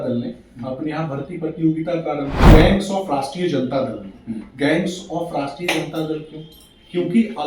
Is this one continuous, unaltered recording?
no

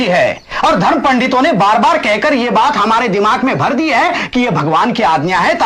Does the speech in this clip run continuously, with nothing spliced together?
yes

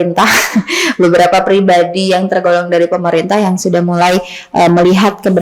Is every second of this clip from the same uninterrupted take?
yes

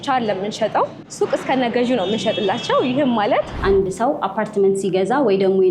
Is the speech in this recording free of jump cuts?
no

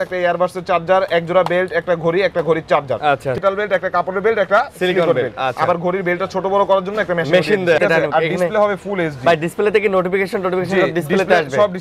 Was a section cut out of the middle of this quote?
yes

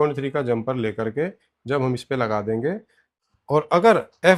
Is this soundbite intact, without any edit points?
no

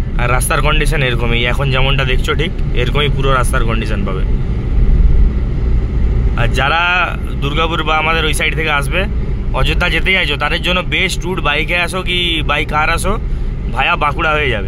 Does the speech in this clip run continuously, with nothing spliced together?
yes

